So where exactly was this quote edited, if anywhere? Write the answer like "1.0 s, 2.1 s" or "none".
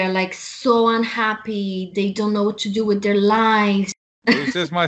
4.0 s

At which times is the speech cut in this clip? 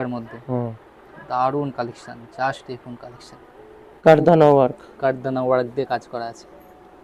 4.0 s

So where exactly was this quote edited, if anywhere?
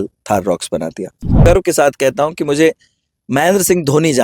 1.4 s

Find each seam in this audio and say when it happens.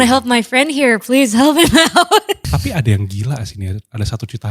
2.4 s

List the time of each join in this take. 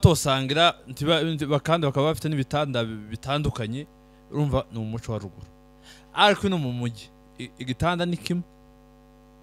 none

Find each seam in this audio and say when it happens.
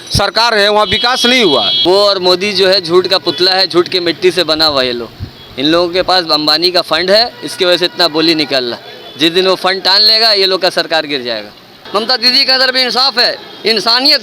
1.8 s, 11.7 s

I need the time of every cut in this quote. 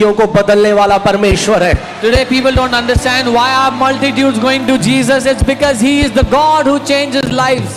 none

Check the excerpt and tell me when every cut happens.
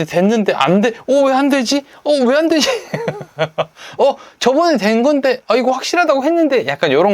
none

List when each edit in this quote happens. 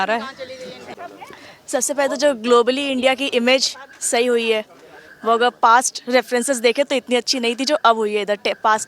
0.9 s

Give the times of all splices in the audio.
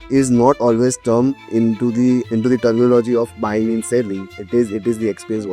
2.3 s

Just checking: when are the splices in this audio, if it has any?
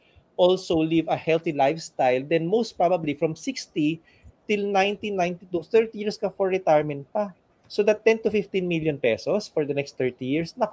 none

